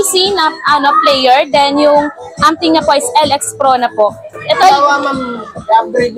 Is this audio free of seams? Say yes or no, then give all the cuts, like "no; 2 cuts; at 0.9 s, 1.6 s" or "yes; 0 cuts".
no; 1 cut; at 4.6 s